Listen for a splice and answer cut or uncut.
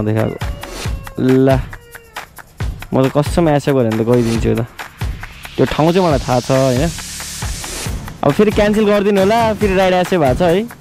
uncut